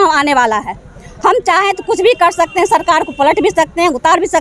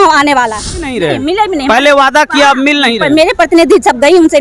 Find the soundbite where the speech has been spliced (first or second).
second